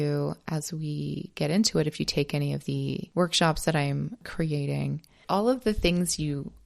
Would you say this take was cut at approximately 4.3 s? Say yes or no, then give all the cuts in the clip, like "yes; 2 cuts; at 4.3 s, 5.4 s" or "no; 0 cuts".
yes; 3 cuts; at 3.0 s, 4.3 s, 5.2 s